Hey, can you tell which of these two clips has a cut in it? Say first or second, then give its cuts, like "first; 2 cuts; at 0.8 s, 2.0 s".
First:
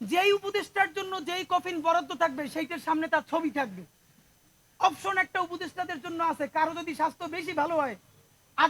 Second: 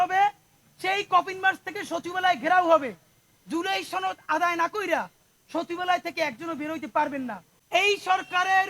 second; 1 cut; at 7.5 s